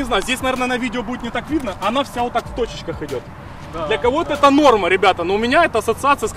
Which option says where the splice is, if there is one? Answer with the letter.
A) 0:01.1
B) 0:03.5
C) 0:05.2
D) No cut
D